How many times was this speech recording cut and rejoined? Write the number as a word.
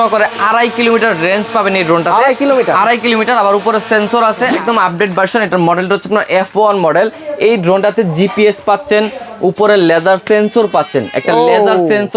one